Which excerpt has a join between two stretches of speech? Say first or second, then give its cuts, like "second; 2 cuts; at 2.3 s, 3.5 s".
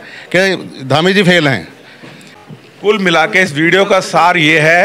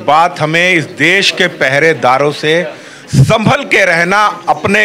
first; 1 cut; at 2.5 s